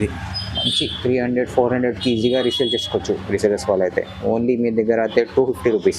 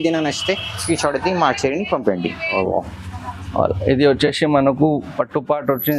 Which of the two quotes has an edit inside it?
second; 1 cut; at 2.5 s

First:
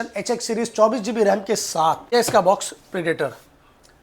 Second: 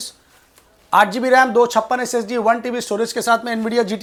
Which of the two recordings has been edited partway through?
first; 1 cut; at 2.1 s

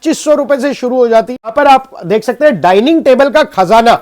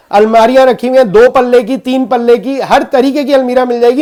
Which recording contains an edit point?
first; 1 cut; at 1.5 s

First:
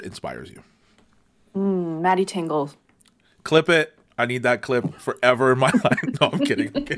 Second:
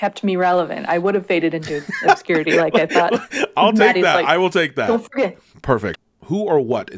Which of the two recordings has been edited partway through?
second; 1 cut; at 5.9 s

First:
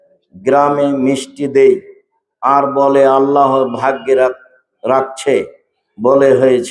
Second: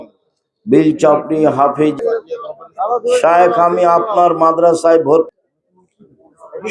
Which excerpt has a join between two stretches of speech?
second; 2 cuts; at 2.0 s, 5.3 s

